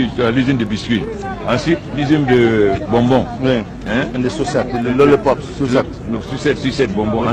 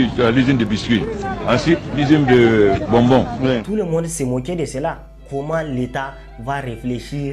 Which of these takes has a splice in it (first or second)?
second